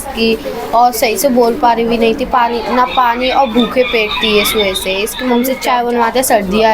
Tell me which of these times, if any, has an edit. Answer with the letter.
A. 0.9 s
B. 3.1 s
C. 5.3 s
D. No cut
C